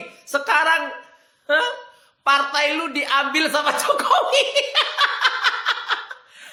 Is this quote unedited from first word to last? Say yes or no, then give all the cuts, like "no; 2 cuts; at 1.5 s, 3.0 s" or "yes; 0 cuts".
yes; 0 cuts